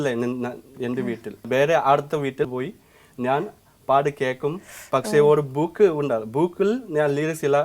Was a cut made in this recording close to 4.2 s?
no; 2 cuts; at 1.5 s, 2.5 s

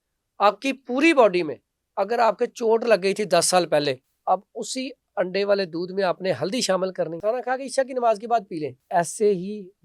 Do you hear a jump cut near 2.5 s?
no; 3 cuts; at 4.1 s, 7.1 s, 8.8 s

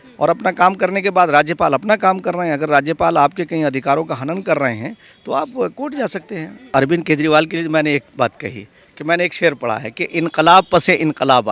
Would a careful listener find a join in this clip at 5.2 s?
no; 1 cut; at 6.7 s

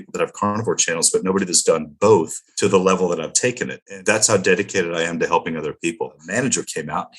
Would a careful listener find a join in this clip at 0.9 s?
no; 3 cuts; at 2.4 s, 3.8 s, 6.2 s

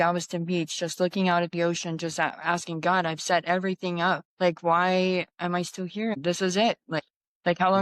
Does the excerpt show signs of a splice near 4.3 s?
yes; 2 cuts; at 4.3 s, 6.1 s

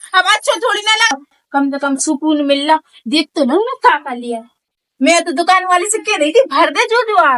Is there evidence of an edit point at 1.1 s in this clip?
yes; 1 cut; at 1.1 s

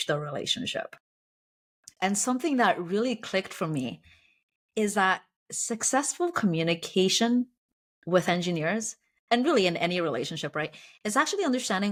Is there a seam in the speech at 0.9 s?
no; 0 cuts

